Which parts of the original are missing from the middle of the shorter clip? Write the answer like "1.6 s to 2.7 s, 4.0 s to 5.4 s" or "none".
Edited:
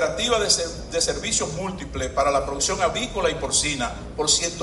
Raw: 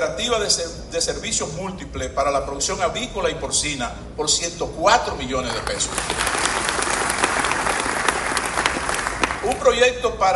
none